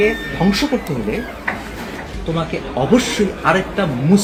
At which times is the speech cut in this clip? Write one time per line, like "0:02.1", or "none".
none